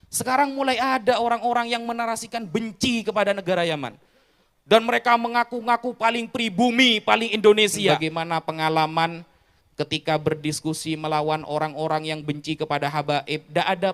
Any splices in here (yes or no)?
yes